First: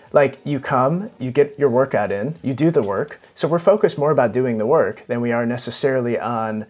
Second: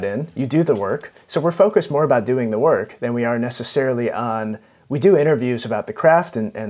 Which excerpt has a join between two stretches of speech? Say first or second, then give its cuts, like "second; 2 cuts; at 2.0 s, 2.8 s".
first; 1 cut; at 1.2 s